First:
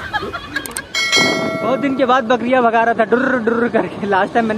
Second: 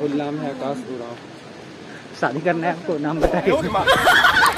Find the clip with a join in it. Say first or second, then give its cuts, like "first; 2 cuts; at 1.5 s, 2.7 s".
first; 1 cut; at 1.1 s